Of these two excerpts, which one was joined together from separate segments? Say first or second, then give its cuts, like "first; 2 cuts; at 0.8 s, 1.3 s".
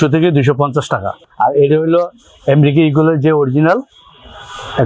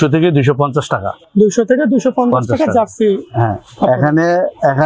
first; 1 cut; at 1.2 s